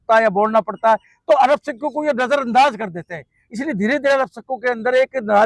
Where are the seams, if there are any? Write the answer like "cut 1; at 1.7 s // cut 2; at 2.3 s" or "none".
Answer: none